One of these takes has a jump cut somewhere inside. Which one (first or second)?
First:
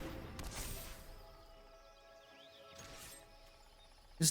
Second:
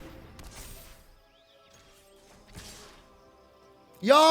second